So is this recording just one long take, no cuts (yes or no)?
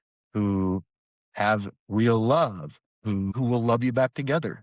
no